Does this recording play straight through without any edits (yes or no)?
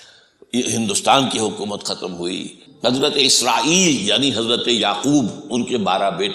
no